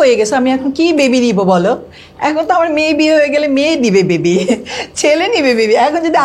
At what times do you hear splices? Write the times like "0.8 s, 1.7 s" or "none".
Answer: none